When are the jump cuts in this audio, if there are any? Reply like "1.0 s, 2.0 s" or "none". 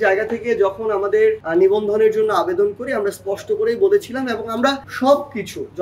1.4 s, 4.9 s